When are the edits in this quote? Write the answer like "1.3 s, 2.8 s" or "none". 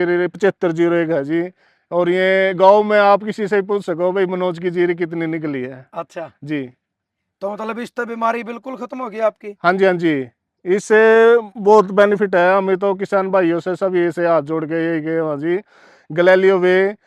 none